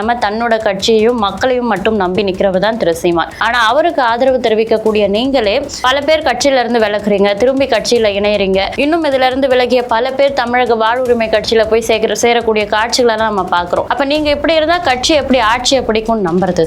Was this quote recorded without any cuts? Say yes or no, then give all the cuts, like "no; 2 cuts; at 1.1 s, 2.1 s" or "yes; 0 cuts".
no; 3 cuts; at 5.7 s, 8.7 s, 13.9 s